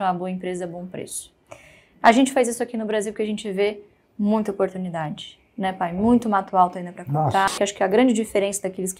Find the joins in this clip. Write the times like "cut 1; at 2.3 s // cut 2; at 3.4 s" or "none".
cut 1; at 7.5 s